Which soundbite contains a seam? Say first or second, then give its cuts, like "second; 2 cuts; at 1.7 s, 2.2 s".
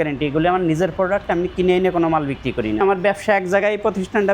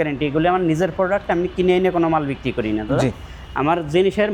first; 1 cut; at 2.8 s